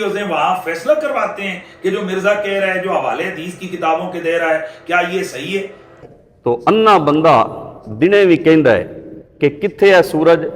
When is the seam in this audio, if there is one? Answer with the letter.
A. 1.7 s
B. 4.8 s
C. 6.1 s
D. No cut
C